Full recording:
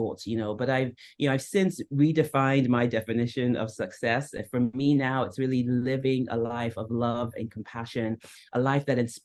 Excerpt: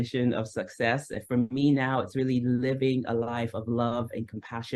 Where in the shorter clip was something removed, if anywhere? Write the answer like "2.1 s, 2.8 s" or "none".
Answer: none